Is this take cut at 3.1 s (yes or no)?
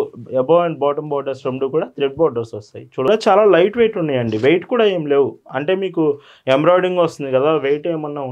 yes